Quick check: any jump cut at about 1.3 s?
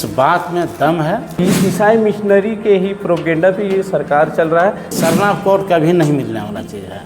yes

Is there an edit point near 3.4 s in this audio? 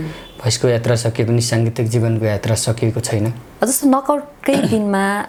no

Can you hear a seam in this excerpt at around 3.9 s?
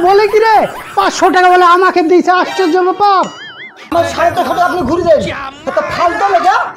yes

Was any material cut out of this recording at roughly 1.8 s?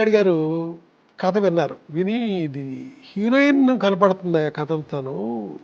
yes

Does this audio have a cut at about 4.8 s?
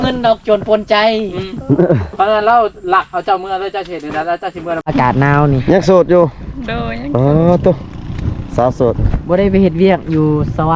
yes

